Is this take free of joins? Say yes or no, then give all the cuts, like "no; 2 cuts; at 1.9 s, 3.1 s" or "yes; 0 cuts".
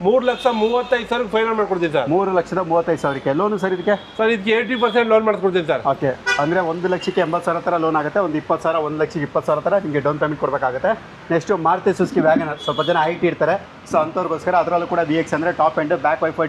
yes; 0 cuts